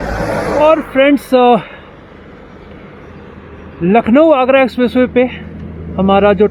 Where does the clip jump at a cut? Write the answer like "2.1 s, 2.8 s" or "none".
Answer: none